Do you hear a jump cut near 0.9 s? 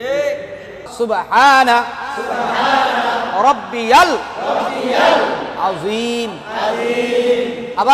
yes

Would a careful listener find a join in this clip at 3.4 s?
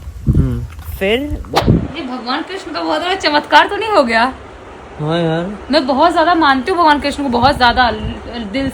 no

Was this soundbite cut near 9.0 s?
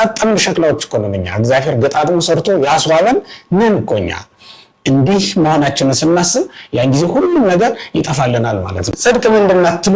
yes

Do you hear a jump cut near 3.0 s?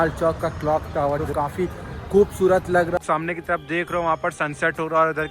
yes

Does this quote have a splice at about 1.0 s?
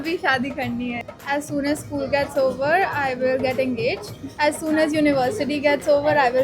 yes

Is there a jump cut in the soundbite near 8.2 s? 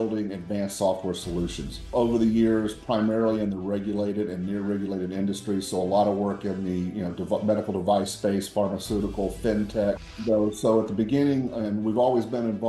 no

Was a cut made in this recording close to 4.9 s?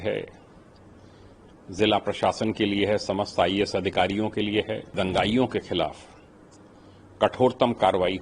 yes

